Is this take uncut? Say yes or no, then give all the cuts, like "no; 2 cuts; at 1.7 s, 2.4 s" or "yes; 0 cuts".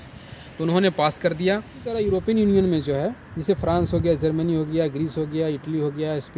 no; 1 cut; at 2.0 s